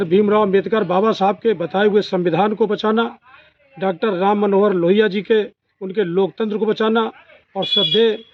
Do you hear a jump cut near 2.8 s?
no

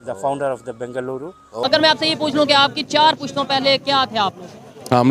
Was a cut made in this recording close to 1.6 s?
yes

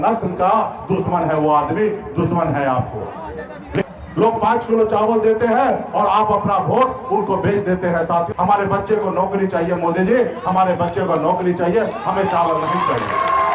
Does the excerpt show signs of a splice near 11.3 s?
no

